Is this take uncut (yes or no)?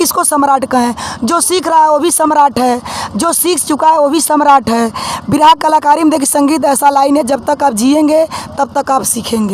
yes